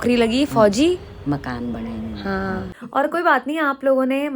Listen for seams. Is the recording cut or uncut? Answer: cut